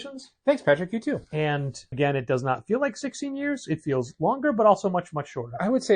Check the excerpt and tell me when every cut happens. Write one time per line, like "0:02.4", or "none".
0:01.9